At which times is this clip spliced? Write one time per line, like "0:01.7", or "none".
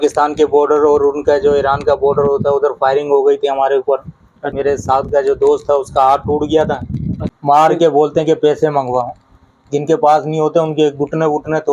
0:04.5
0:07.3